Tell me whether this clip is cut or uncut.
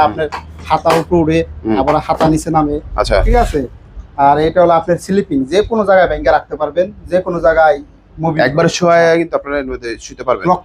uncut